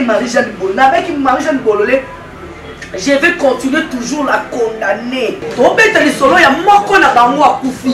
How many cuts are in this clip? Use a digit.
1